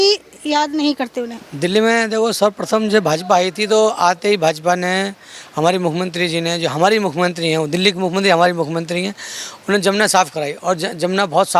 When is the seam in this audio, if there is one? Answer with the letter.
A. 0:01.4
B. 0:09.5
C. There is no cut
A